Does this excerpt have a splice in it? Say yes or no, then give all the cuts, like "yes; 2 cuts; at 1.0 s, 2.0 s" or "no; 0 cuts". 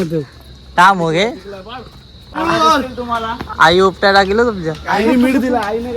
yes; 1 cut; at 2.4 s